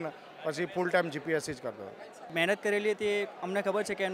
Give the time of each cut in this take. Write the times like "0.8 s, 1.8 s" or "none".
2.3 s